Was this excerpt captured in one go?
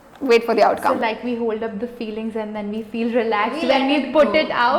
yes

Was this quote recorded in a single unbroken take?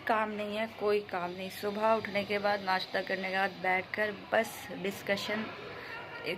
yes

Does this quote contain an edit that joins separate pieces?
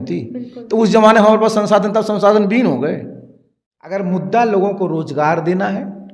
yes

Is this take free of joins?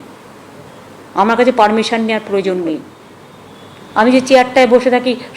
no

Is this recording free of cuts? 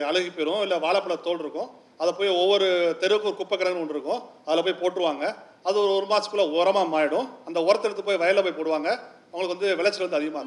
yes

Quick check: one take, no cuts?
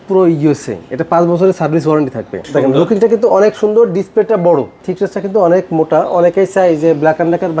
no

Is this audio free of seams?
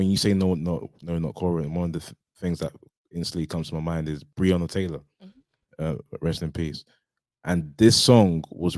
no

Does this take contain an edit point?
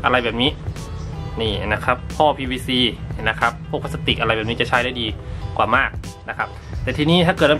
no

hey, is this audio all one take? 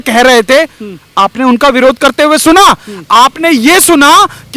yes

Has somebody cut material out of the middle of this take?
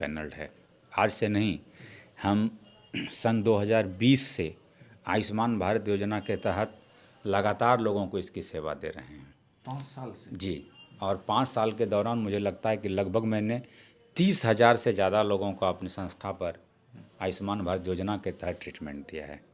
no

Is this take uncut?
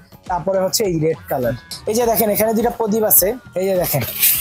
no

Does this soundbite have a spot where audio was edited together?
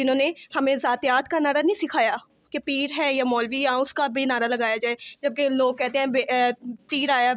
no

